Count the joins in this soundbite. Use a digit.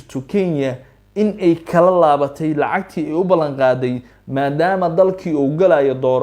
0